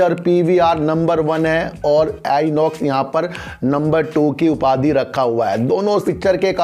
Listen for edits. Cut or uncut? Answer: uncut